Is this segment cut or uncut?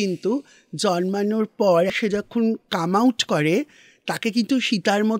cut